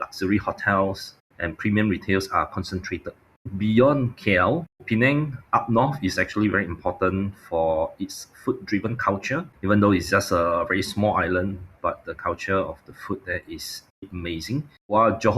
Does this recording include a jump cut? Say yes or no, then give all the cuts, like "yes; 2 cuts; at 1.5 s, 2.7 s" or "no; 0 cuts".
yes; 3 cuts; at 3.5 s, 4.8 s, 14.5 s